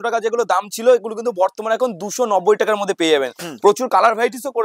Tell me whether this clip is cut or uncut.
uncut